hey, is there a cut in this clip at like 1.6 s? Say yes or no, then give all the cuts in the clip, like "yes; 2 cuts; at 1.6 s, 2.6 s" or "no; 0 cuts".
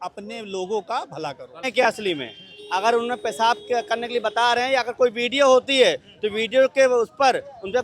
yes; 1 cut; at 1.6 s